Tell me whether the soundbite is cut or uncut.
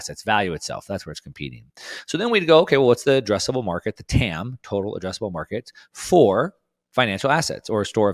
uncut